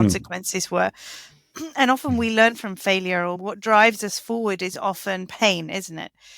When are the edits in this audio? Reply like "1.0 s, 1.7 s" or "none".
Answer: 3.4 s